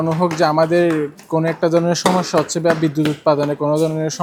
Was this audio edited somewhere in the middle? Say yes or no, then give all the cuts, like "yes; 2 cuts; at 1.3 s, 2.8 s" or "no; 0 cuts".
no; 0 cuts